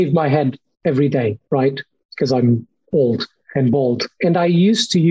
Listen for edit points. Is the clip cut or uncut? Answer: cut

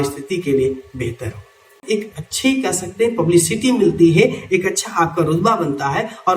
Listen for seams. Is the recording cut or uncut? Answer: cut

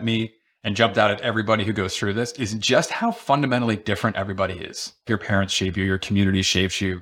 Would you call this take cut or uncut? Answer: cut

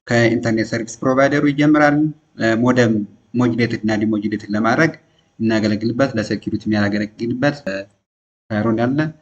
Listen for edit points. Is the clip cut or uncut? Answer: cut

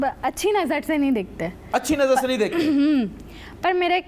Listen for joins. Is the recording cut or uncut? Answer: uncut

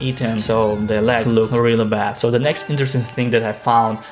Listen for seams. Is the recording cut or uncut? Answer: cut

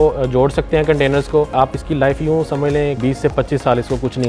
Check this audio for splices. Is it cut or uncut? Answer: cut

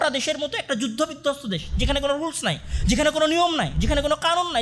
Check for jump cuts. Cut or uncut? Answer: uncut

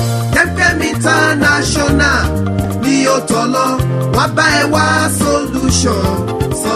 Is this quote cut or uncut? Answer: uncut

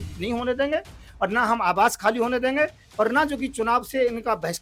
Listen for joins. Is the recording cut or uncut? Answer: uncut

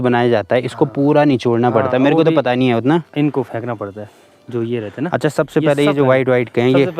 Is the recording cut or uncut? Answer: uncut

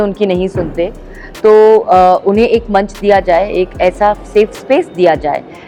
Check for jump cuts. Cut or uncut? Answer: uncut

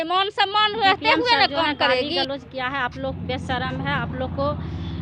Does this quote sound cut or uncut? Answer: cut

